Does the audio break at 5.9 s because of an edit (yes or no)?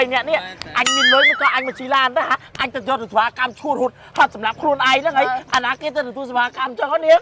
no